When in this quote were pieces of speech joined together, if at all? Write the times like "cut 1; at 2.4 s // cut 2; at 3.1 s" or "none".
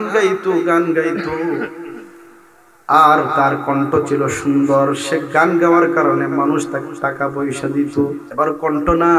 cut 1; at 8.2 s